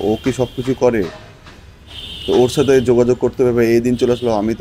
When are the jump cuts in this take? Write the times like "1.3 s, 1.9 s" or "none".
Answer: none